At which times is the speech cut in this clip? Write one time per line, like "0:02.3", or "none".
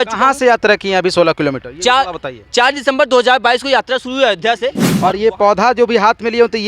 0:04.9

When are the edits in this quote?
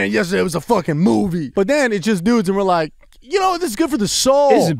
0:01.4

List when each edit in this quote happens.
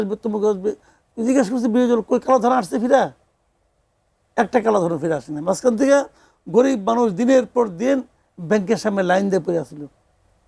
none

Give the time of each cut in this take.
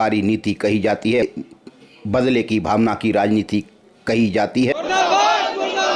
0:01.2
0:04.7

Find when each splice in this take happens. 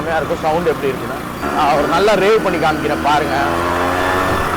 0:01.4

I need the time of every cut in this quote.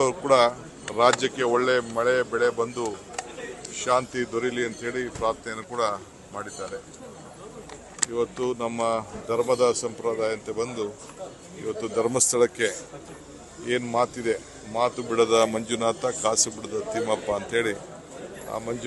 none

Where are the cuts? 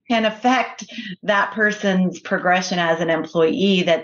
none

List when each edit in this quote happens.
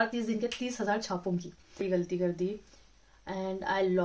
0:01.8

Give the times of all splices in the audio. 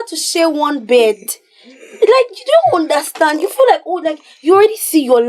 none

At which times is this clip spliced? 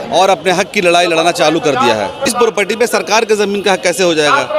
0:02.3

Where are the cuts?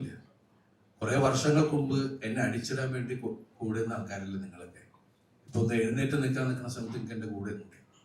none

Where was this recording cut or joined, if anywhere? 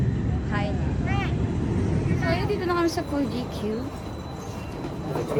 none

